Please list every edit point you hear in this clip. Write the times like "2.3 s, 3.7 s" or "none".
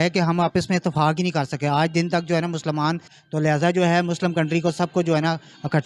3.2 s